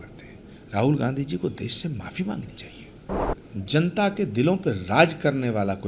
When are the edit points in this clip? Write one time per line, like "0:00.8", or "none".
0:03.4